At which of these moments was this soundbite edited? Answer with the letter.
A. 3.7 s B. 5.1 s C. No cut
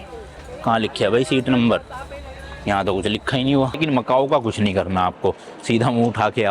A